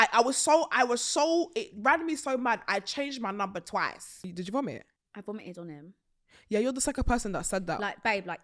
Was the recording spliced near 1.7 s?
no; 2 cuts; at 4.2 s, 5.0 s

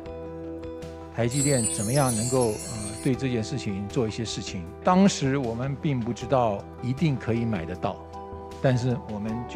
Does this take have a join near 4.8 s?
yes; 1 cut; at 4.8 s

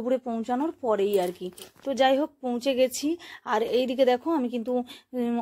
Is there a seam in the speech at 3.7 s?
yes; 1 cut; at 3.7 s

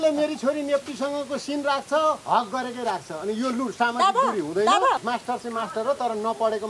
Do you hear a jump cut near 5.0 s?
yes; 1 cut; at 5.0 s

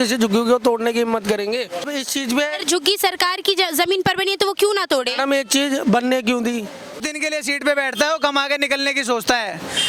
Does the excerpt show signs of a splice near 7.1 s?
yes; 2 cuts; at 1.8 s, 7.1 s

